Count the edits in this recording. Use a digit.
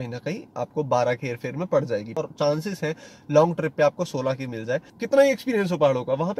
2